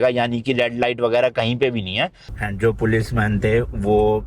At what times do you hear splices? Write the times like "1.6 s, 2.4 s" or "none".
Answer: 2.2 s